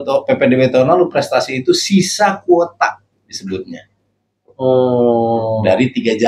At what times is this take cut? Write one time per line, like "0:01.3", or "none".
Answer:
none